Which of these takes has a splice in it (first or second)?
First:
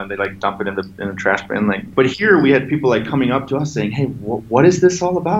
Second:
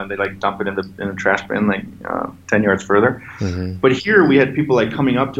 first